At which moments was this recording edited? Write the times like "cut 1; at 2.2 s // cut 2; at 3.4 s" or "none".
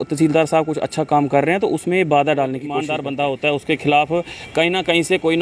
cut 1; at 2.0 s // cut 2; at 2.9 s